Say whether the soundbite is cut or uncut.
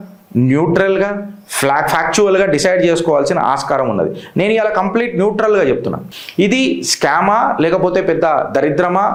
uncut